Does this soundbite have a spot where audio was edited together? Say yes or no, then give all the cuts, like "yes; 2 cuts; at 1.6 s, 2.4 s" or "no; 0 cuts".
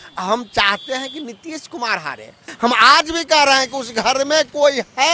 yes; 1 cut; at 2.5 s